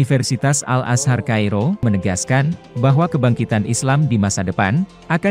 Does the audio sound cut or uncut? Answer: cut